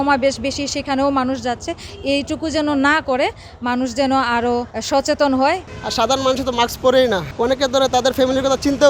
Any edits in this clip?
yes; 3 cuts; at 4.7 s, 5.7 s, 7.3 s

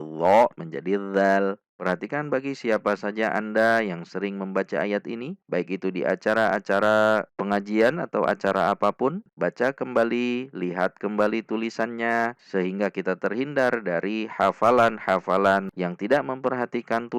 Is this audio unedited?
no; 3 cuts; at 1.7 s, 9.2 s, 15.7 s

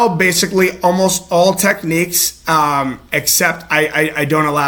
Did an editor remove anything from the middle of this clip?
no; 0 cuts

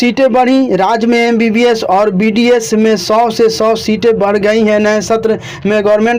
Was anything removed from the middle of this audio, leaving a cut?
no; 0 cuts

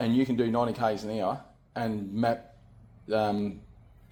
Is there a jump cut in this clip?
no; 0 cuts

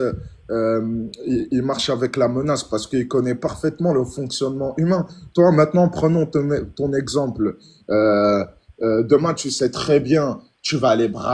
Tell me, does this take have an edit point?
no; 0 cuts

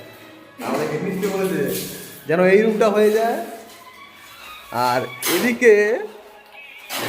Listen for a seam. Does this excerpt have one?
no; 0 cuts

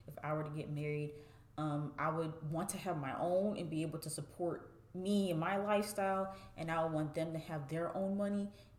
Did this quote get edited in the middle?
no; 0 cuts

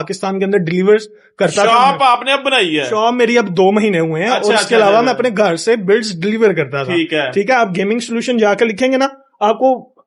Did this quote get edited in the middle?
no; 0 cuts

